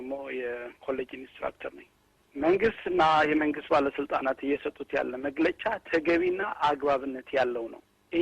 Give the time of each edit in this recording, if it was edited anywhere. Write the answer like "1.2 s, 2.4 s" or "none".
2.1 s